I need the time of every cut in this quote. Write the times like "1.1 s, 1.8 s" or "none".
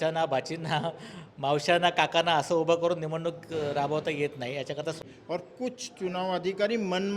5.0 s

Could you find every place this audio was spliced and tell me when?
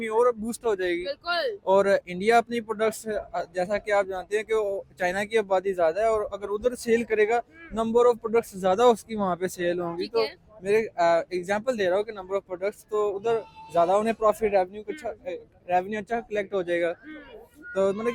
none

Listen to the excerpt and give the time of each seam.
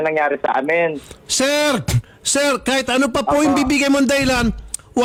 none

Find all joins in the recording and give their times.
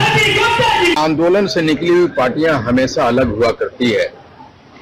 0.9 s

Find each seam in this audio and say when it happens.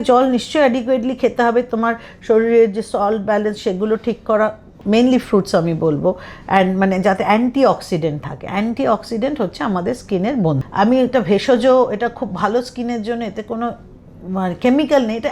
4.7 s, 10.6 s

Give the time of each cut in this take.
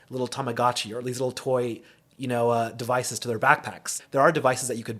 4.0 s

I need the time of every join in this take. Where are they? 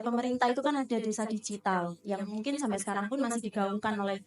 none

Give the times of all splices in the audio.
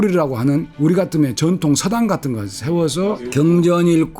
3.2 s

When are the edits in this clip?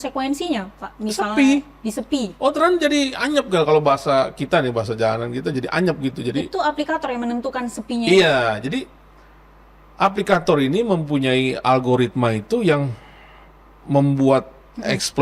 none

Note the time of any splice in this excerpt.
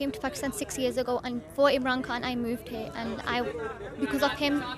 none

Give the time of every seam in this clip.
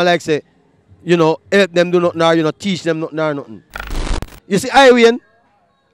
4.0 s

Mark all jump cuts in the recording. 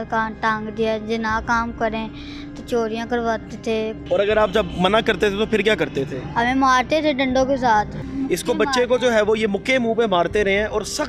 4.0 s, 8.0 s

